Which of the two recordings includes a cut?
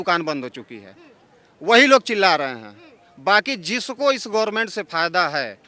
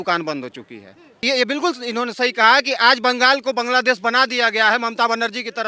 second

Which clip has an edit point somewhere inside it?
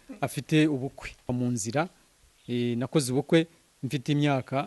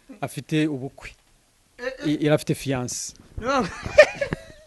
first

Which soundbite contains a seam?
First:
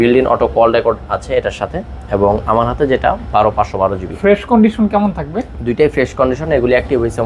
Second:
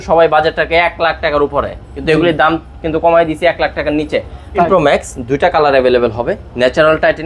second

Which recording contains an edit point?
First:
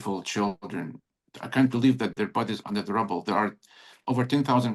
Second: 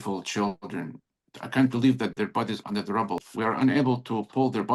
second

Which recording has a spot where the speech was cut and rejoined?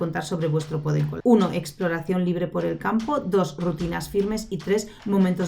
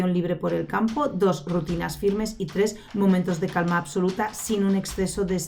first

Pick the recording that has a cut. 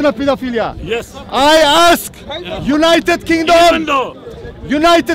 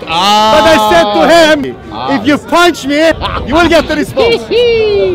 second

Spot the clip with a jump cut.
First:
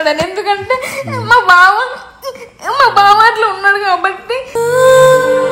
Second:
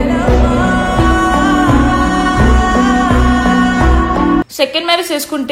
second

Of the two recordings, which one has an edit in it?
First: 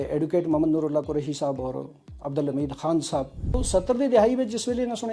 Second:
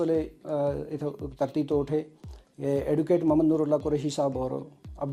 first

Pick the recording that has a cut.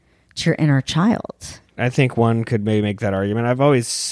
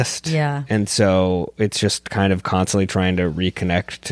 first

